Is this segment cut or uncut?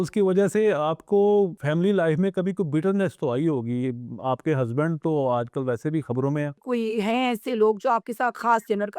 cut